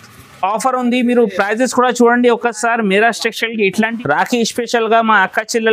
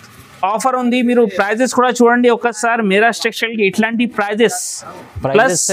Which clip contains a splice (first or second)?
first